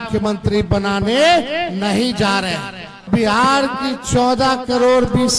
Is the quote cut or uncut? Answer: cut